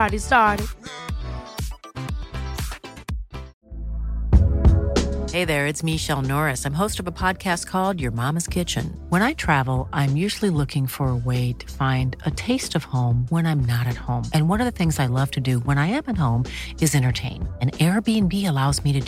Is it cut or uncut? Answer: cut